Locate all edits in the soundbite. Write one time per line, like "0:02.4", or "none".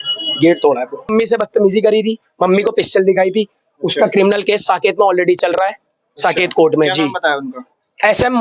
0:01.1